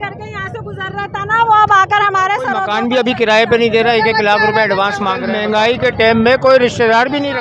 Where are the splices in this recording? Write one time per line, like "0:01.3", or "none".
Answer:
0:02.6
0:05.2

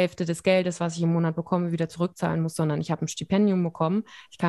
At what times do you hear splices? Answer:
none

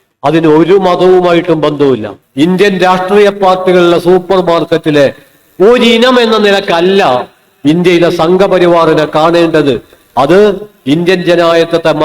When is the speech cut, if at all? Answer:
0:02.2

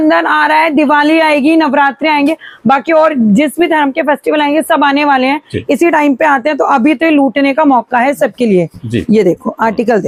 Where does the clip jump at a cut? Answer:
none

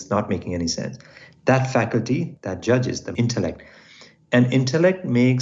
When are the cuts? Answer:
0:02.4
0:03.1

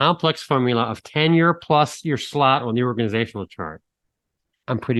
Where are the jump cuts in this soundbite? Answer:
none

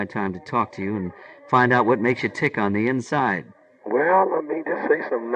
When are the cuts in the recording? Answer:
none

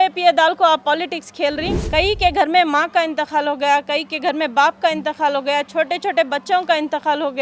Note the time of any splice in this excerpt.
0:01.7

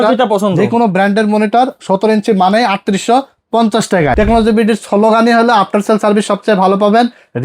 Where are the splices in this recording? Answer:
0:04.1

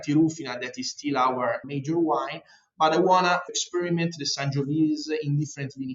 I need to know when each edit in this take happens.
0:01.6
0:03.5

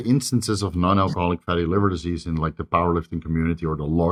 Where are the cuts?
none

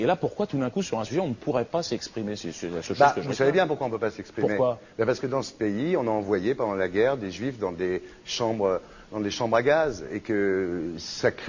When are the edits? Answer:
0:04.5

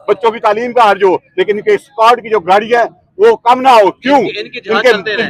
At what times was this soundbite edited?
none

